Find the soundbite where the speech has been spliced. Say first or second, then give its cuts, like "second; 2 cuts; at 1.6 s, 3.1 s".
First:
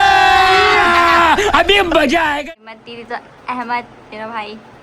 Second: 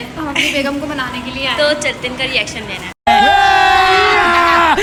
first; 1 cut; at 2.4 s